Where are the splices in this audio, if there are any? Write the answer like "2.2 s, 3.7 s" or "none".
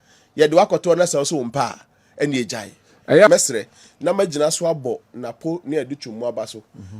3.3 s